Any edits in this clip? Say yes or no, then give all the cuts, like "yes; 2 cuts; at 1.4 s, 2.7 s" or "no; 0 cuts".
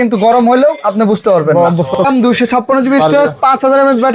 yes; 1 cut; at 2.0 s